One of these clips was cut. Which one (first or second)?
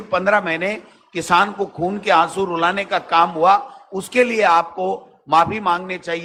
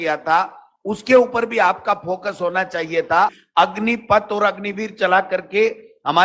second